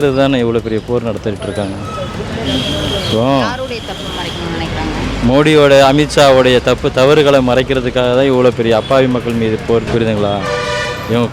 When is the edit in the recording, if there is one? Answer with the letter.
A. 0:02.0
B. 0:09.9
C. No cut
B